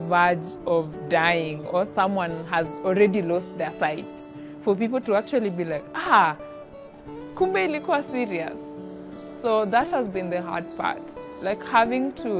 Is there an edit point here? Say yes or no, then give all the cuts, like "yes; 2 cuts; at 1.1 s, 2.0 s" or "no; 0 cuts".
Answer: no; 0 cuts